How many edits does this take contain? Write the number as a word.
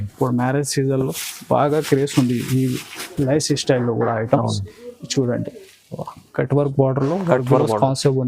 one